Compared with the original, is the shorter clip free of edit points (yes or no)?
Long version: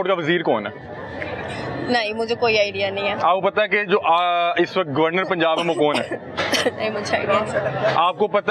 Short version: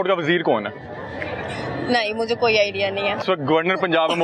no